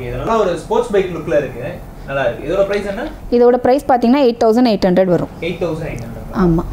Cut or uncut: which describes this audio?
uncut